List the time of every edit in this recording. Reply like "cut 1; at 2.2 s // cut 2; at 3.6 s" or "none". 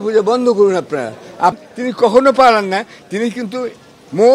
cut 1; at 1.6 s